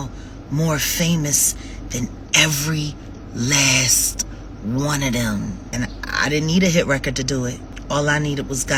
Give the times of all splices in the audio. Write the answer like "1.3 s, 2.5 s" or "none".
none